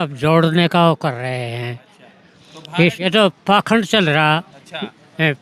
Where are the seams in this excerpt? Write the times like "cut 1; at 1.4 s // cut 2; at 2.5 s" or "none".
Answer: cut 1; at 3.0 s